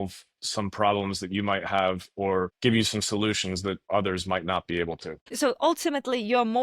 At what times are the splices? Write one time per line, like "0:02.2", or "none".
0:05.3